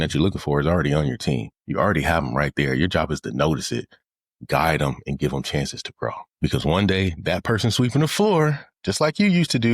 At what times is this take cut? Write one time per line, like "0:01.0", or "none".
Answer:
0:01.6
0:06.3

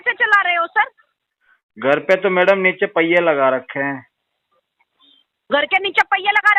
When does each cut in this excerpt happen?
none

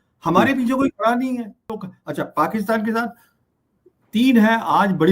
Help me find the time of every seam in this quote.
0:01.8

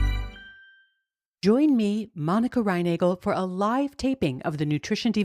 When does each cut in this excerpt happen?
0:01.2

